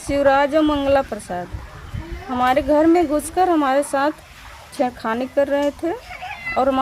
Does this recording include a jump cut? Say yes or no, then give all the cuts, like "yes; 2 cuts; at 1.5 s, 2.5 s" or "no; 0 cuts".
no; 0 cuts